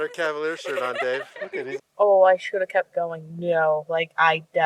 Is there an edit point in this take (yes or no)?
yes